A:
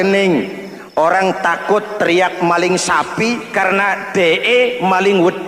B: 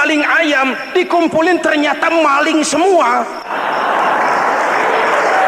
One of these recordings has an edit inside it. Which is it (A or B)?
B